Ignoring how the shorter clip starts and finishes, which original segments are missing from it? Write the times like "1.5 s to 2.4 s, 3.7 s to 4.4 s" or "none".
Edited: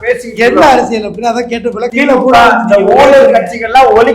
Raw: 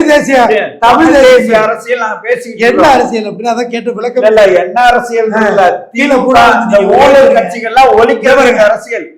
4.0 s to 5.8 s